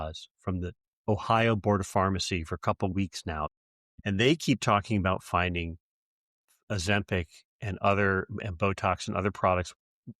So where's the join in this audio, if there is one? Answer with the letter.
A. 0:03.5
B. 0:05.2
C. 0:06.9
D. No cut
A